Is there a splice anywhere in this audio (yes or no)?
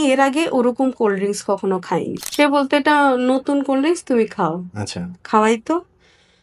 yes